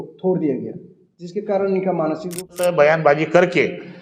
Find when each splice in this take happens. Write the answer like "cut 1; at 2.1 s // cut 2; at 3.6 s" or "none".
cut 1; at 2.6 s